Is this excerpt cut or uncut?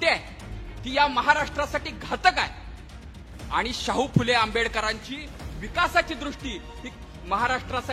uncut